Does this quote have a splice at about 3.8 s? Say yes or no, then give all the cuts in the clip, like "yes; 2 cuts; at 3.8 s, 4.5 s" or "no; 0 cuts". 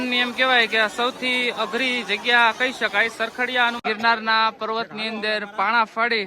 yes; 1 cut; at 3.8 s